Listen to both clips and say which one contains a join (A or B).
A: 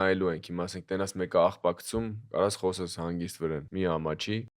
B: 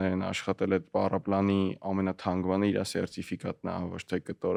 A